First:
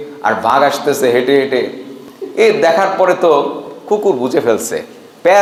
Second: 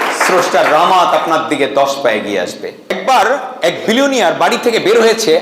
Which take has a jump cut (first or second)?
second